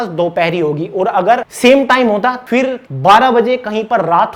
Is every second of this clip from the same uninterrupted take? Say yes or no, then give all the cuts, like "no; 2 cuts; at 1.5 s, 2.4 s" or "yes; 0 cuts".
no; 2 cuts; at 1.5 s, 2.5 s